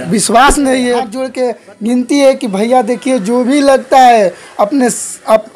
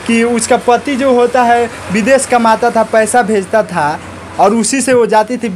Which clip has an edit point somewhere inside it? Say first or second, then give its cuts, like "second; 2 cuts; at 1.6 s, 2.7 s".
first; 1 cut; at 1.2 s